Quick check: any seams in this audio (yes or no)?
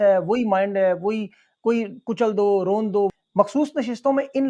yes